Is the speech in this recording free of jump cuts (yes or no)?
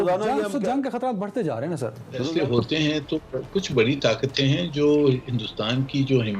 no